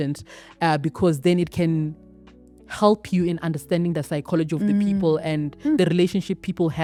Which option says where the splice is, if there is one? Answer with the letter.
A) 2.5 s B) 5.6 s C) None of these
C